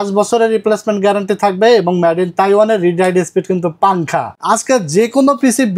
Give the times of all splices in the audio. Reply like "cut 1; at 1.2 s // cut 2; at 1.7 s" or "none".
cut 1; at 4.3 s